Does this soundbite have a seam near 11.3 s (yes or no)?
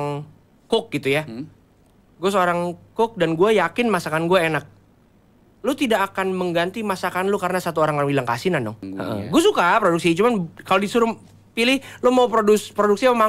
no